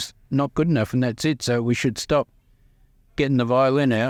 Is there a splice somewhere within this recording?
no; 0 cuts

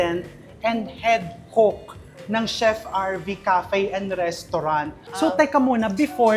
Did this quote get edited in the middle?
yes; 1 cut; at 5.0 s

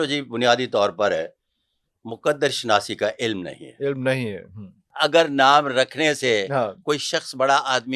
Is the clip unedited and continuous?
no; 1 cut; at 4.9 s

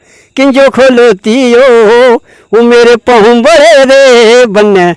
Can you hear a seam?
no; 0 cuts

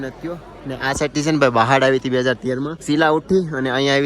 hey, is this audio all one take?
no; 1 cut; at 2.8 s

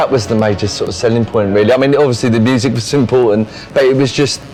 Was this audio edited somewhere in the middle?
no; 0 cuts

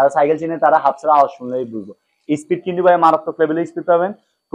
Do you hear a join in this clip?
no; 0 cuts

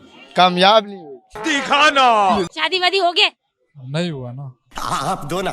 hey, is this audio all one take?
no; 1 cut; at 2.5 s

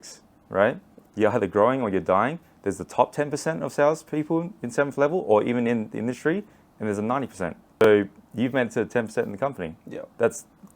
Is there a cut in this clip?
yes; 1 cut; at 7.6 s

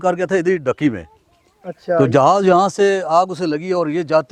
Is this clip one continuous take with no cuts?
yes; 0 cuts

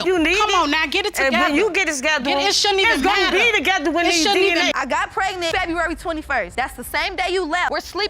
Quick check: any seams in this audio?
yes; 1 cut; at 4.7 s

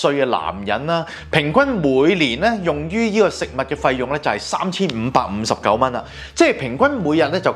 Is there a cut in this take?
no; 0 cuts

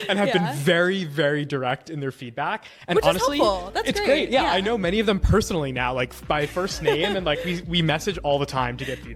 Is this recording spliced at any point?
no; 0 cuts

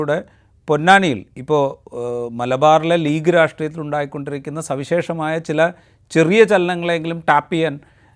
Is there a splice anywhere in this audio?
no; 0 cuts

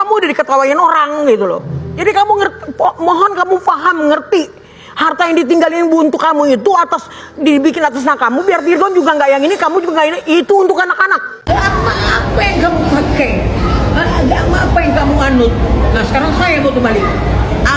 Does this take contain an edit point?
no; 0 cuts

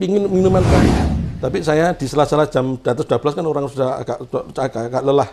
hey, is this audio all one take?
no; 1 cut; at 0.9 s

